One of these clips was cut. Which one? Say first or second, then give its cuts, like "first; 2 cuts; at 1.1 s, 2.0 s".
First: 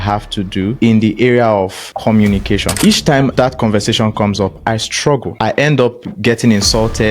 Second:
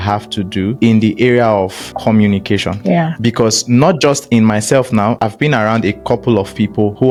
first; 1 cut; at 2.7 s